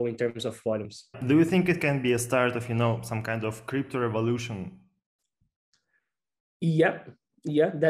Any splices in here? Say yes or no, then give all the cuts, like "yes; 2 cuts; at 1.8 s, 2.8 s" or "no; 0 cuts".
yes; 1 cut; at 1.2 s